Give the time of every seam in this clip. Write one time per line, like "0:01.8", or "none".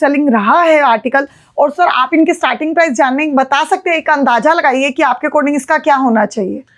none